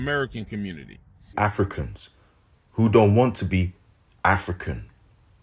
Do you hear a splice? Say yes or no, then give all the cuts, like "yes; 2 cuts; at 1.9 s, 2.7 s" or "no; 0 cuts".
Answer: yes; 1 cut; at 1.3 s